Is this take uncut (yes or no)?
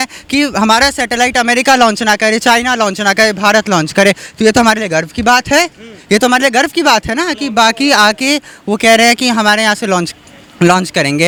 yes